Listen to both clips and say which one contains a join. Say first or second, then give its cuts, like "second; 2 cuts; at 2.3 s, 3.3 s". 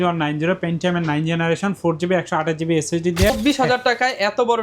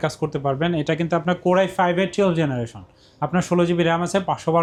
first; 1 cut; at 3.3 s